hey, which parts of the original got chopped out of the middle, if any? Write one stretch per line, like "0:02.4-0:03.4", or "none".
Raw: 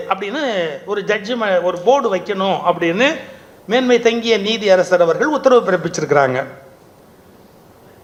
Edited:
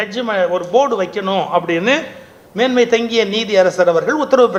none